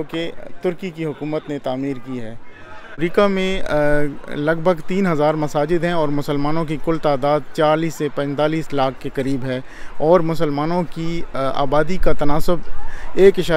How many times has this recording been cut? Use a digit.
1